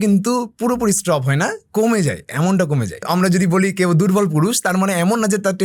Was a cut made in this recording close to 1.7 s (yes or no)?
no